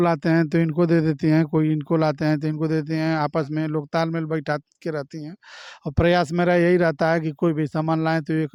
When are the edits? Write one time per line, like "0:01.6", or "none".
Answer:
none